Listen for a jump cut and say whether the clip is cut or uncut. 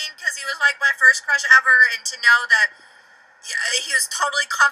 uncut